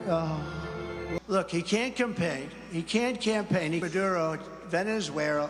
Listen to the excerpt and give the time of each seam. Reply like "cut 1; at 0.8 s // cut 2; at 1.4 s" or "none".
cut 1; at 1.2 s // cut 2; at 3.8 s